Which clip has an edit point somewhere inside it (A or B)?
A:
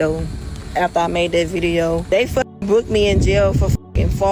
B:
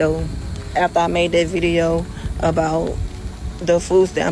A